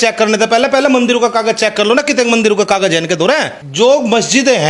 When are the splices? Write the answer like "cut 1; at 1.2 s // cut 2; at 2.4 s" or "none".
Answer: cut 1; at 3.6 s

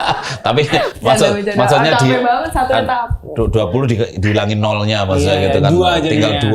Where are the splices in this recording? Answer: none

